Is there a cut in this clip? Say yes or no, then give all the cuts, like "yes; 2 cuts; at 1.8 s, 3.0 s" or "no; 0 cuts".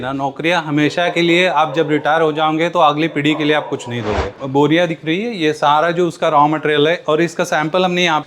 yes; 1 cut; at 4.4 s